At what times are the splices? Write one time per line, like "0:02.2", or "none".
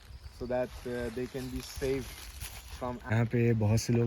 0:03.0